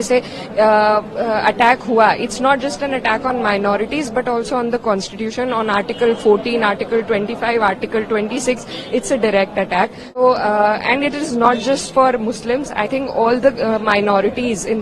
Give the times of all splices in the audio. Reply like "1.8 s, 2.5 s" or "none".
10.2 s